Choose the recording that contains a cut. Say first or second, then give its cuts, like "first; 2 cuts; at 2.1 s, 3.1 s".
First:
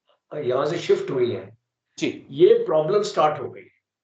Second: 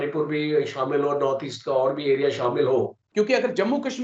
second; 1 cut; at 3.0 s